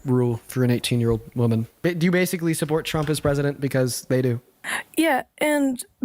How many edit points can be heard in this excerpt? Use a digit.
1